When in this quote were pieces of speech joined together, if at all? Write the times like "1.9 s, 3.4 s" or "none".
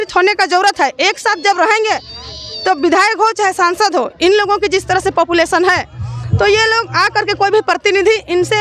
none